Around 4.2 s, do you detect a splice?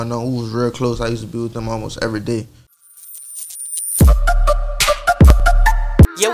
no; 1 cut; at 2.8 s

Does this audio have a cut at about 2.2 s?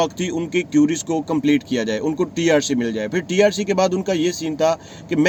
no; 0 cuts

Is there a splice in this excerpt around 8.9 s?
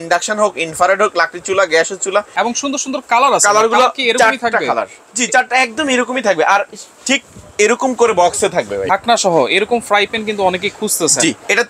yes; 2 cuts; at 2.3 s, 8.9 s

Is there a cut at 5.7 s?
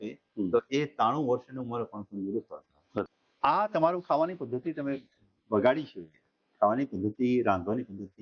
no; 1 cut; at 3.0 s

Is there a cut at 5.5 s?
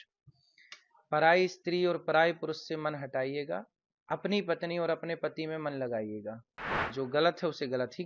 no; 1 cut; at 6.8 s

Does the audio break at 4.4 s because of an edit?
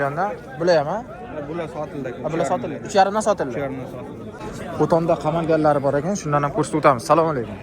yes; 1 cut; at 4.4 s

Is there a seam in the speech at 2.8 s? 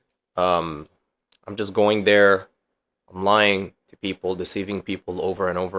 no; 0 cuts

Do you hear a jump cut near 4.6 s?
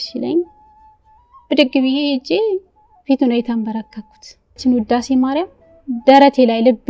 yes; 1 cut; at 4.6 s

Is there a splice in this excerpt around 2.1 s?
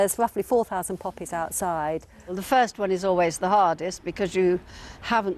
yes; 1 cut; at 2.1 s

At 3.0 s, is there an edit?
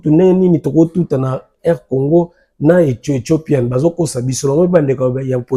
no; 0 cuts

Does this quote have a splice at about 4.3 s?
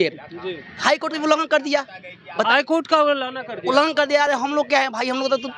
no; 0 cuts

